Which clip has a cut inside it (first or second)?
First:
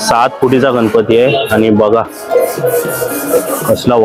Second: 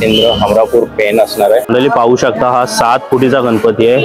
second